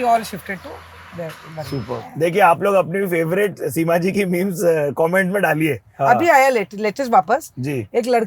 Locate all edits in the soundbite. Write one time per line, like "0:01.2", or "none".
0:02.1
0:05.9